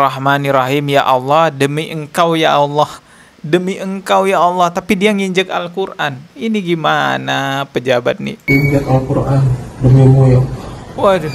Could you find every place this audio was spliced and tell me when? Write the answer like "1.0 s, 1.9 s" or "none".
8.4 s